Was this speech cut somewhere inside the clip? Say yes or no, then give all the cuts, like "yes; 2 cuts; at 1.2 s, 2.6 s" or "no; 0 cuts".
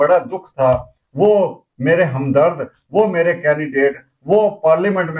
no; 0 cuts